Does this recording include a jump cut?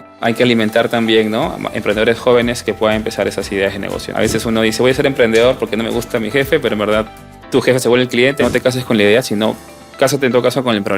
yes; 2 cuts; at 4.1 s, 8.4 s

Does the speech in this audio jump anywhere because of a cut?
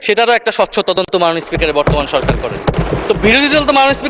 yes; 1 cut; at 2.8 s

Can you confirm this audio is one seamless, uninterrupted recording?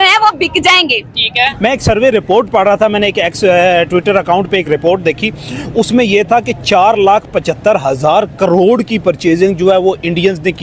yes; 0 cuts

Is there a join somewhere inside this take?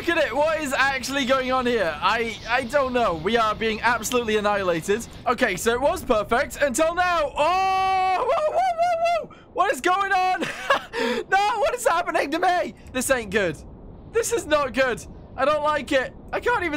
yes; 2 cuts; at 5.1 s, 12.8 s

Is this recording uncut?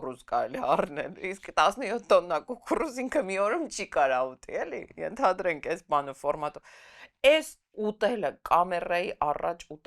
yes; 0 cuts

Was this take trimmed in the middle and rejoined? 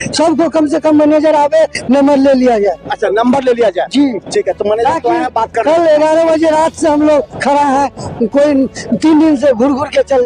no; 0 cuts

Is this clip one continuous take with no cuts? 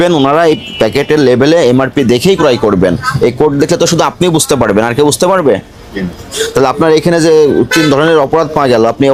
yes; 0 cuts

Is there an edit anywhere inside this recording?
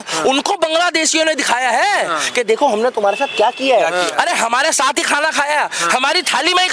no; 0 cuts

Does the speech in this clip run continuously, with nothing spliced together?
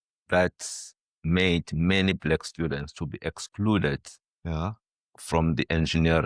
yes; 0 cuts

